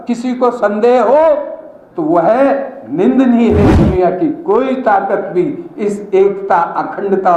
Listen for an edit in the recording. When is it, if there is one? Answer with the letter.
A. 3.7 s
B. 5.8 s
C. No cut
A